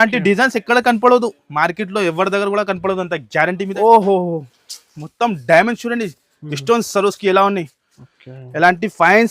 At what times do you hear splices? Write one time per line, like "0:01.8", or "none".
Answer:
0:03.7